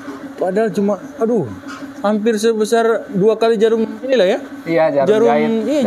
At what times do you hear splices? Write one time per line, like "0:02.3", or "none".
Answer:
none